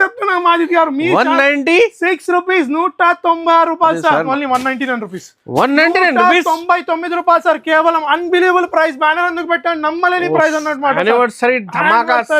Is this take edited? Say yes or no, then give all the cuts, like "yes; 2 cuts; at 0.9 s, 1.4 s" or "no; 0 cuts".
yes; 1 cut; at 4.3 s